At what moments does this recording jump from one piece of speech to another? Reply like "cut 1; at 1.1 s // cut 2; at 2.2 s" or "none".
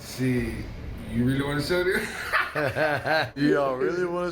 cut 1; at 3.3 s